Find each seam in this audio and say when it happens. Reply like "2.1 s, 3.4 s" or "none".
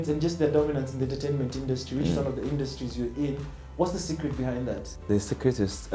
4.9 s